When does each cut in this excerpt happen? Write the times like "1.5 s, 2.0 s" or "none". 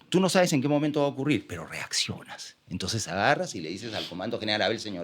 none